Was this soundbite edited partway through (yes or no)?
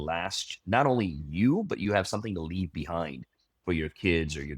yes